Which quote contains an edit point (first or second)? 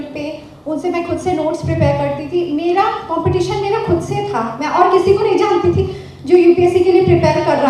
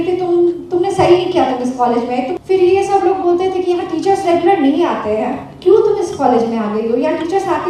second